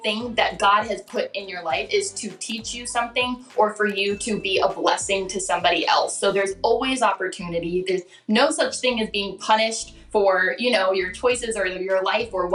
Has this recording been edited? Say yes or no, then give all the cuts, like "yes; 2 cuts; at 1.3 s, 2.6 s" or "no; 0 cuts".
no; 0 cuts